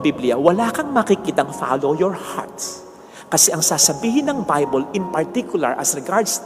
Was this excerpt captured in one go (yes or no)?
yes